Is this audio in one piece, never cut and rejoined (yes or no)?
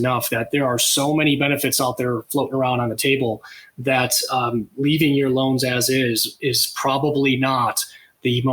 yes